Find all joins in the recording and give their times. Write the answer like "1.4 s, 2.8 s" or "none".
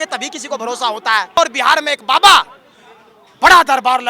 1.4 s